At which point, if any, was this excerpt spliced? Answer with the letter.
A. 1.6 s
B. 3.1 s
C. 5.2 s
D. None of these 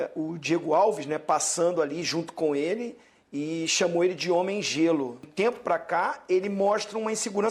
C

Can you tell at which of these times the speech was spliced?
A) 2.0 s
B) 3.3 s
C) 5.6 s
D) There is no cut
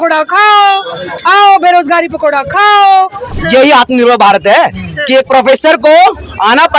B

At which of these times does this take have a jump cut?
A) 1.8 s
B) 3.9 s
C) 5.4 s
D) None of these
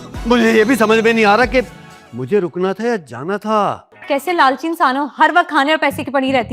B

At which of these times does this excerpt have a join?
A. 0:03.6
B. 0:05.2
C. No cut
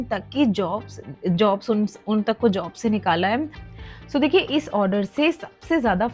A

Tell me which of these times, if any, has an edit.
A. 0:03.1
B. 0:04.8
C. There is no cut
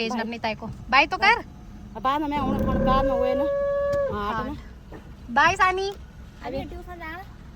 C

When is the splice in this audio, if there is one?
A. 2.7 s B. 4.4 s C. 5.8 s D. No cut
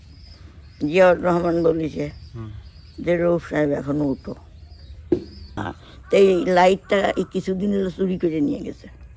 C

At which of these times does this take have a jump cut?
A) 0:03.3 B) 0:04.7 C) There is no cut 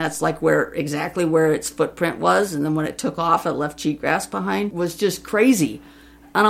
B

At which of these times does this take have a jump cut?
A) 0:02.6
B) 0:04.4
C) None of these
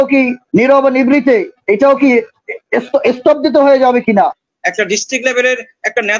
B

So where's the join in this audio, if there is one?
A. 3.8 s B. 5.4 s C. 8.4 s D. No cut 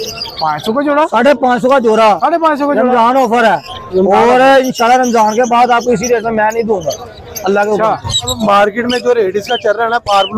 C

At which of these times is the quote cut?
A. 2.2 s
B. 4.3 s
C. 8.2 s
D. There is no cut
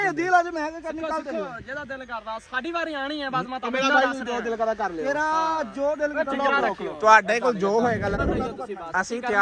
C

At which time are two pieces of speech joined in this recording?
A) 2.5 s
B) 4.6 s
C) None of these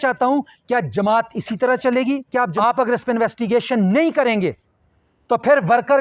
A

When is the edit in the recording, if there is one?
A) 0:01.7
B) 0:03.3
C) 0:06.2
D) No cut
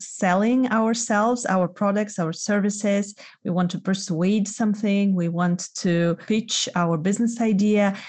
C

